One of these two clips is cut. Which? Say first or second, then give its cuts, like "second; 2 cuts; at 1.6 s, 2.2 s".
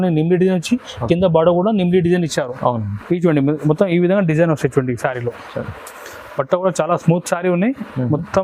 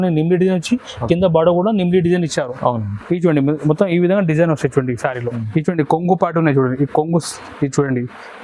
second; 1 cut; at 5.4 s